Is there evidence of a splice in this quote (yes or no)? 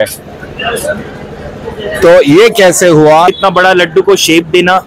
yes